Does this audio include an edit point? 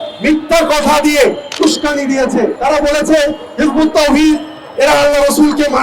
yes; 2 cuts; at 1.5 s, 2.6 s

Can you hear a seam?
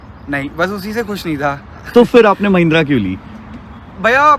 no; 0 cuts

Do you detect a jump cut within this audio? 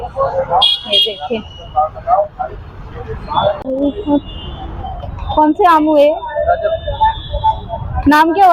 yes; 1 cut; at 3.6 s

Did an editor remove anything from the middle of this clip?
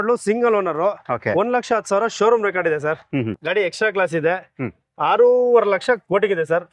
no; 0 cuts

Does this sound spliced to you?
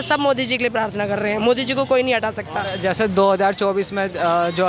no; 0 cuts

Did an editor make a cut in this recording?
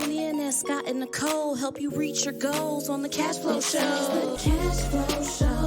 yes; 1 cut; at 4.4 s

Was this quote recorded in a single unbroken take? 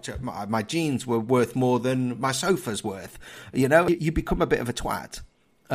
no; 1 cut; at 3.9 s

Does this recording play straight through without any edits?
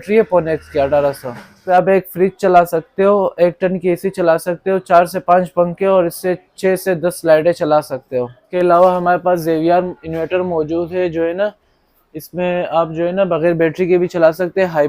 no; 2 cuts; at 1.5 s, 8.4 s

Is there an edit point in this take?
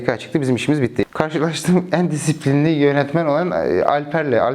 yes; 1 cut; at 1.0 s

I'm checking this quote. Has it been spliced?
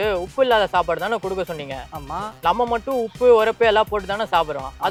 no; 0 cuts

